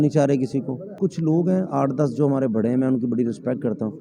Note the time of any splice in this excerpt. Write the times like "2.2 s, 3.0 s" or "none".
1.0 s